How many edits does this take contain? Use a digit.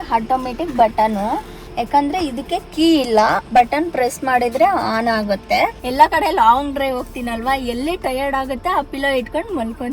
1